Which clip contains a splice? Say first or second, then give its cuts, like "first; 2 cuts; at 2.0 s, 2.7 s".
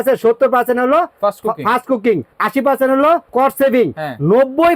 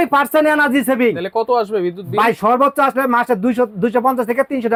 first; 2 cuts; at 2.3 s, 3.3 s